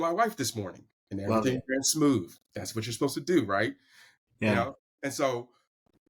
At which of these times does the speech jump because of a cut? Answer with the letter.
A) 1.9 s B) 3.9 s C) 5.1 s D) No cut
D